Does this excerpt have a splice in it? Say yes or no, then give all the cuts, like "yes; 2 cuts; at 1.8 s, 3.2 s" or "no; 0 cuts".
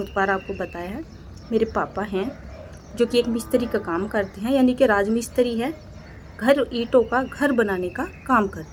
no; 0 cuts